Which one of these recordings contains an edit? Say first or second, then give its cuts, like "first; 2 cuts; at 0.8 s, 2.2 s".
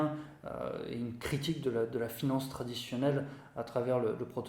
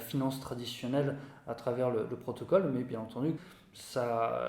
second; 1 cut; at 3.4 s